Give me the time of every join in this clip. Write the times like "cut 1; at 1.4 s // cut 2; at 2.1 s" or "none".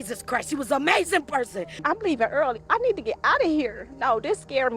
cut 1; at 1.8 s